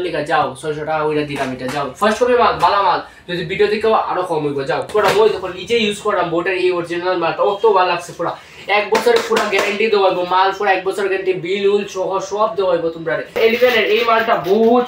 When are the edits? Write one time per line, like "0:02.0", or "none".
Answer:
0:04.9
0:13.4